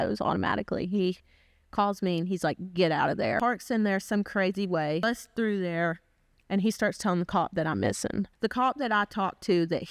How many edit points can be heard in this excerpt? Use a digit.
3